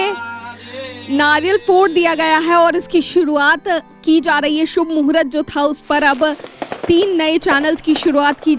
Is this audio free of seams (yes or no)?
yes